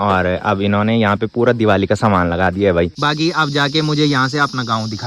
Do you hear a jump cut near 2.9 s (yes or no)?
yes